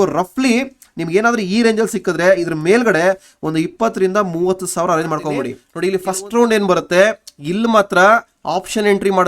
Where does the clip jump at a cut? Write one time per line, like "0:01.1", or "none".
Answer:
0:05.6